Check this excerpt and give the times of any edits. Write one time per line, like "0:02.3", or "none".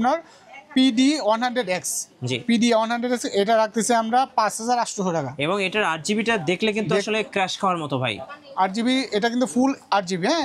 none